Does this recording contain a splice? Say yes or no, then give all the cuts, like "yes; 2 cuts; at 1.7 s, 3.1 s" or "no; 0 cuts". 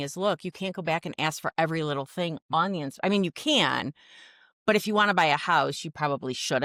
no; 0 cuts